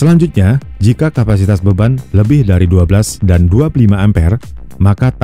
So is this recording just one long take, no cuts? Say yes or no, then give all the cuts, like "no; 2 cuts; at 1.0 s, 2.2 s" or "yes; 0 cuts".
yes; 0 cuts